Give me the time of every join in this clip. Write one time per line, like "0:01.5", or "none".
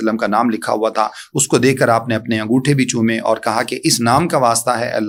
none